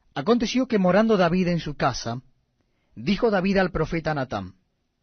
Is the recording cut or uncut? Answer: uncut